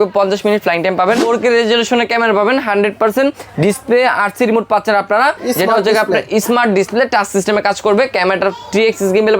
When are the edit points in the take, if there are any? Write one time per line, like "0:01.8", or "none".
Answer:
0:01.2